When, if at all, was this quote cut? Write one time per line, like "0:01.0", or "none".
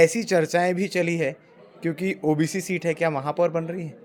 none